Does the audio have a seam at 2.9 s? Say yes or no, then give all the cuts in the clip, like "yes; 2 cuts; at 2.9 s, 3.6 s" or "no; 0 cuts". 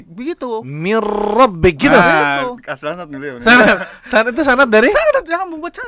no; 0 cuts